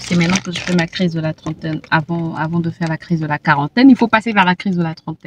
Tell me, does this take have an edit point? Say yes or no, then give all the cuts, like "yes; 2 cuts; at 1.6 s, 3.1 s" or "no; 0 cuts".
no; 0 cuts